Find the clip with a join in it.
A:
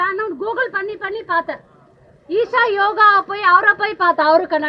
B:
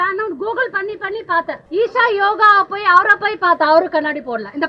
B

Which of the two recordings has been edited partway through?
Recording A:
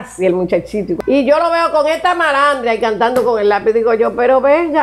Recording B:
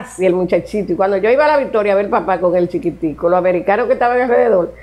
A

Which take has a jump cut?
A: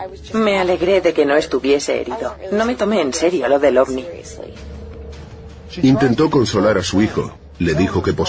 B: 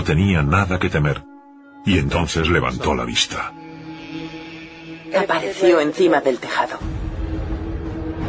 A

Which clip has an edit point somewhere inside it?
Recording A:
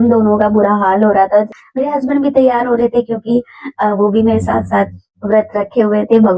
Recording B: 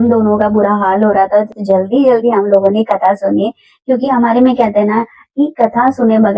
A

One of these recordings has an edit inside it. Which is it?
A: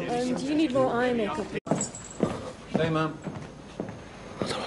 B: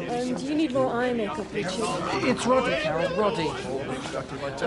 B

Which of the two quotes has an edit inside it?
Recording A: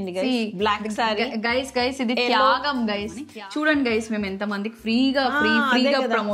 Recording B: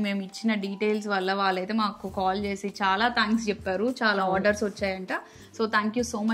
A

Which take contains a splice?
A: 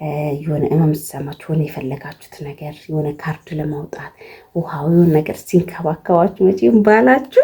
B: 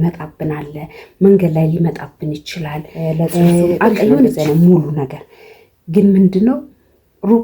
B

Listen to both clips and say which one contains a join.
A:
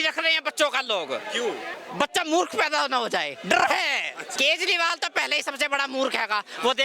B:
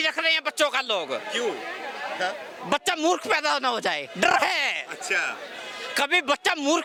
A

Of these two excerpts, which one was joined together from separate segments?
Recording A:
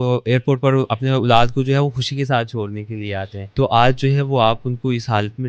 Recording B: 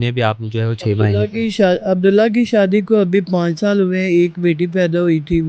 A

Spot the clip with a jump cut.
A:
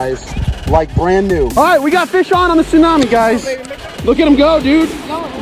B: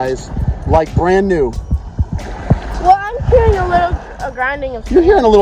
A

